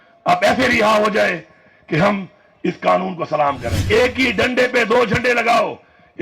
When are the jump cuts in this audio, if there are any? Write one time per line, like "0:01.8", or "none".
0:03.8